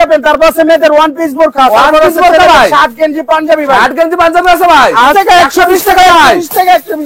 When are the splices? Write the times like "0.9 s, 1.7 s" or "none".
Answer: 5.1 s